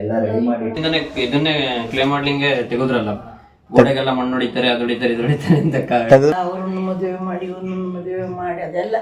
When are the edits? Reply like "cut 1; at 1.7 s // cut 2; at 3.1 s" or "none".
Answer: cut 1; at 0.8 s // cut 2; at 6.3 s